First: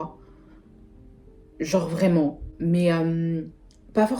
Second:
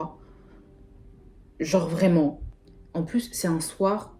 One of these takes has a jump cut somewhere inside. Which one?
second; 1 cut; at 2.5 s

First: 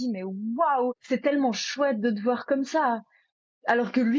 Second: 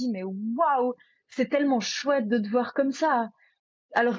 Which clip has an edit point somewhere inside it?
first; 1 cut; at 1.0 s

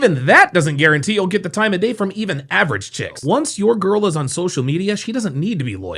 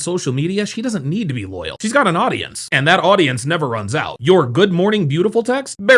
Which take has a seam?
first; 1 cut; at 3.1 s

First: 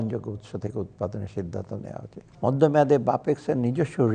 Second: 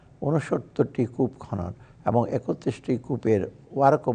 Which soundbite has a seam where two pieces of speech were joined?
first; 1 cut; at 2.2 s

